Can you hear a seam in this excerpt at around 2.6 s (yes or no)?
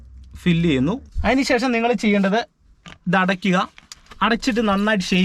no